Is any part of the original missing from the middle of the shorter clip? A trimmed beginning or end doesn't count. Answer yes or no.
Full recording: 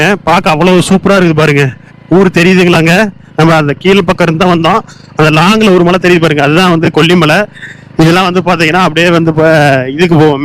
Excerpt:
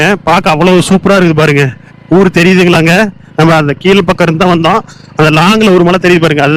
no